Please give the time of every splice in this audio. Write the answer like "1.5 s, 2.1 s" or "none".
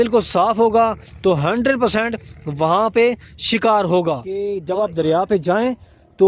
4.5 s